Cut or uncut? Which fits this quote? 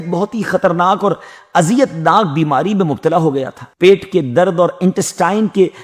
uncut